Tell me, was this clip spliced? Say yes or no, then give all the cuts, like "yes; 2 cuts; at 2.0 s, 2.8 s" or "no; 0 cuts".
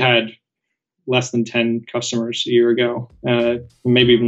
no; 0 cuts